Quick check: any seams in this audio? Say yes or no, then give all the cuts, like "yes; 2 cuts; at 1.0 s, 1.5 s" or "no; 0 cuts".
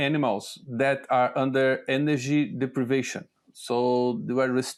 no; 0 cuts